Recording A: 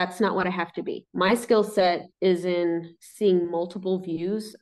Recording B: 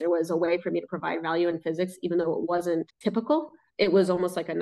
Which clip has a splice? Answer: B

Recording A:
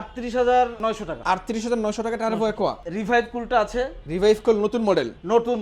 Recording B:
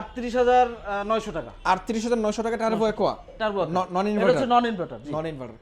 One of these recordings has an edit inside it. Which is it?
A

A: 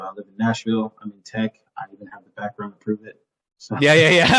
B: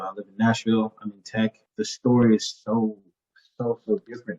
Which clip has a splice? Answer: B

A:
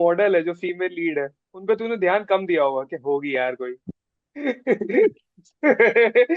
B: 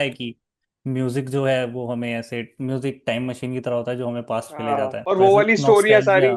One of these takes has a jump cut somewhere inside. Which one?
B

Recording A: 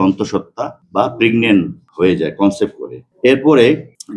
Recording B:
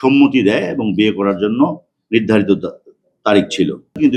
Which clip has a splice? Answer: A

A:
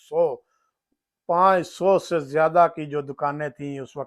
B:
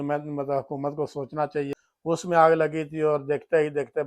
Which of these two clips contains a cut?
B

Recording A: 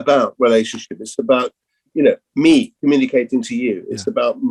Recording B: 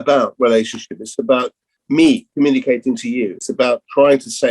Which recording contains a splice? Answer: B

